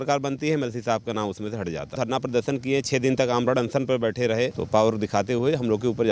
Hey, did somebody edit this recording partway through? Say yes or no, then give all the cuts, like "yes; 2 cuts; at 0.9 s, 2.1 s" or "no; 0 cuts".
yes; 2 cuts; at 1.9 s, 4.6 s